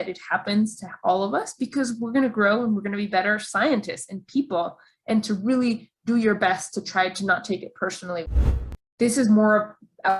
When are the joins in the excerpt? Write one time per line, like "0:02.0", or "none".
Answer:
0:08.7